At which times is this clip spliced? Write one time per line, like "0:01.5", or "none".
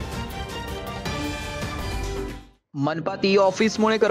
0:02.3